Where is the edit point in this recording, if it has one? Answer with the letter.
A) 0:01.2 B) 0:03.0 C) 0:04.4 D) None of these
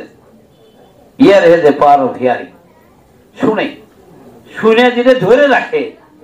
D